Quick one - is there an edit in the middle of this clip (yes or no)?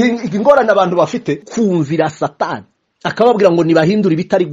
yes